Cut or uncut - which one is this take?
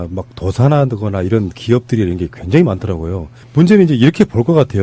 cut